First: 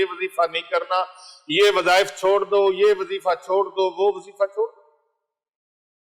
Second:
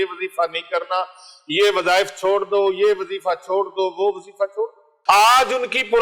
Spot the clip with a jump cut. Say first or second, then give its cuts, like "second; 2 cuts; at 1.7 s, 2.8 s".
second; 1 cut; at 4.9 s